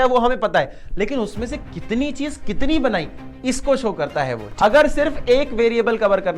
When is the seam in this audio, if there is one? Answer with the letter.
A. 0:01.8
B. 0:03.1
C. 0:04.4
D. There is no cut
C